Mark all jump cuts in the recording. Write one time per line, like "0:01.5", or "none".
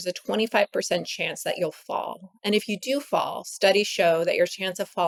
none